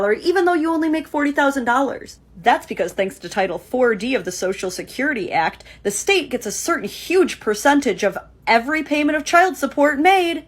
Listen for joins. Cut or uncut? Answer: cut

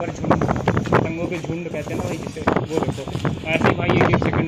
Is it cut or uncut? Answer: uncut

